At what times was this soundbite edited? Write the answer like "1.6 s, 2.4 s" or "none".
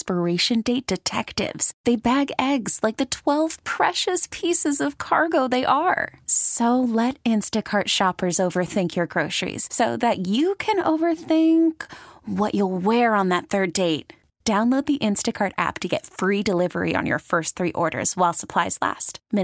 none